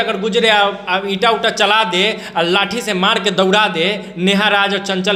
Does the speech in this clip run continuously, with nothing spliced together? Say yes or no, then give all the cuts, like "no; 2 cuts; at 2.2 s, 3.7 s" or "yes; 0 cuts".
yes; 0 cuts